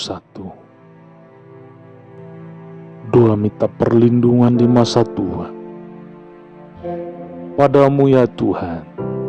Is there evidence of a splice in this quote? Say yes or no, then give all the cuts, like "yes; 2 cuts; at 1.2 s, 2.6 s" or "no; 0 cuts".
no; 0 cuts